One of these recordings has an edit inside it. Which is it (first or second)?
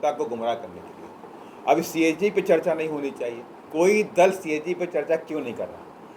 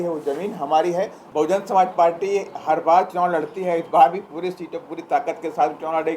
second